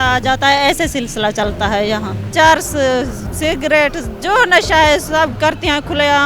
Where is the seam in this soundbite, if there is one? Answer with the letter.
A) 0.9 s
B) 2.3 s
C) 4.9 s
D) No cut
B